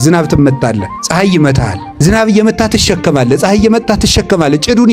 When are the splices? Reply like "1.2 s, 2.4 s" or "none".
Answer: 0.9 s, 1.9 s